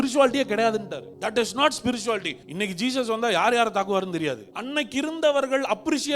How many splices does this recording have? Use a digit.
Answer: 3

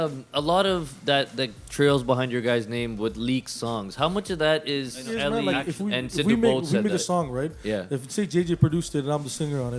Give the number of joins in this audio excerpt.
1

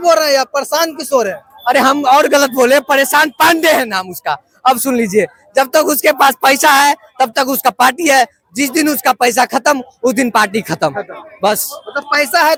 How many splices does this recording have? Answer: 0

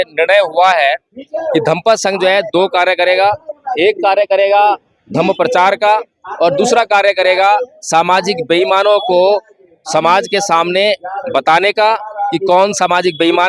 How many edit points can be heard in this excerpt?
0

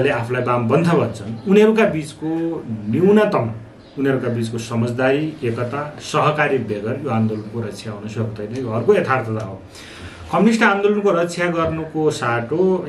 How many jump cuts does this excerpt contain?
0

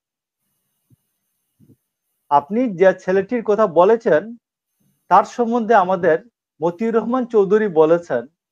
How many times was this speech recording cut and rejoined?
0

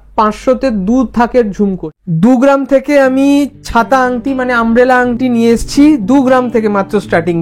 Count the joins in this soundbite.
1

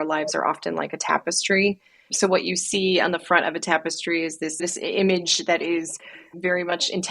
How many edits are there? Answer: 1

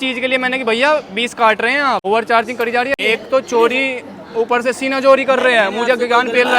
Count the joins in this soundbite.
2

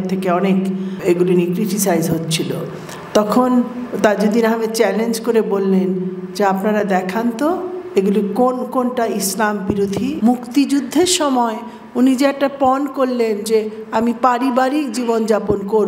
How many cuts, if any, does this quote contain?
1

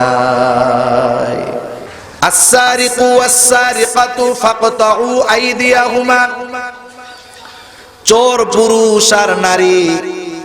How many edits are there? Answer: 1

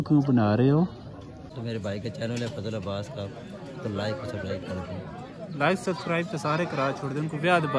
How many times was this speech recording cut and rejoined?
1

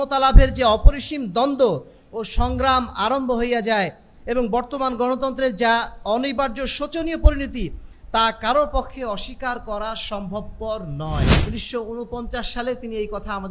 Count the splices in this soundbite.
1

